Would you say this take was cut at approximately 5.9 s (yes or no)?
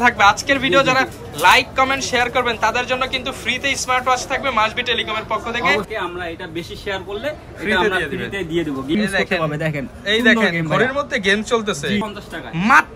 yes